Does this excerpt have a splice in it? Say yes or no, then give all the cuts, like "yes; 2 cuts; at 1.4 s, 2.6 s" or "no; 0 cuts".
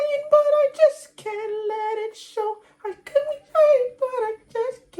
no; 0 cuts